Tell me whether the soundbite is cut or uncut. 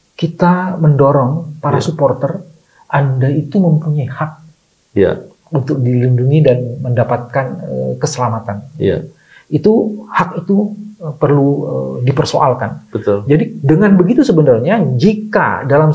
uncut